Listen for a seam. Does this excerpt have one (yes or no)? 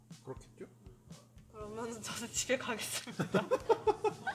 no